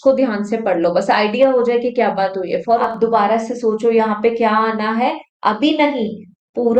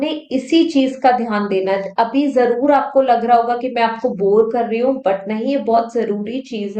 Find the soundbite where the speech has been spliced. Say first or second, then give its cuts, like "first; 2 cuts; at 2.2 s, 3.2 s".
first; 1 cut; at 2.8 s